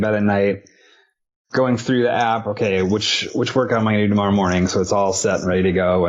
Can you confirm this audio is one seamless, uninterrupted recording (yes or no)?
yes